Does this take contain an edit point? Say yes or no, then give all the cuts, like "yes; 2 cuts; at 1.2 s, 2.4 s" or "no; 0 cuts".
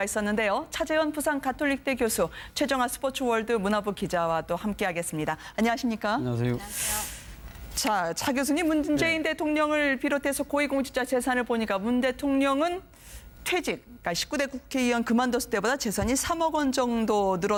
no; 0 cuts